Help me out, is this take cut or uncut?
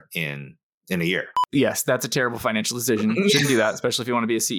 cut